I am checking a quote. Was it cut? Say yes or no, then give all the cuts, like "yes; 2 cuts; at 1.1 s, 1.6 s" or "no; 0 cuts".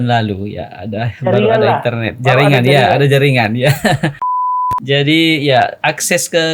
yes; 1 cut; at 4.3 s